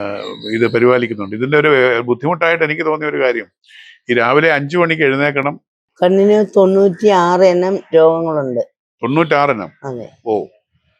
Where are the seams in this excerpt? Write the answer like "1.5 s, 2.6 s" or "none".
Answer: 6.1 s